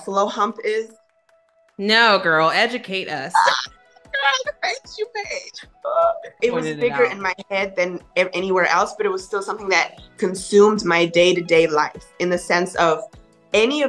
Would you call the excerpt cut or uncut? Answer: cut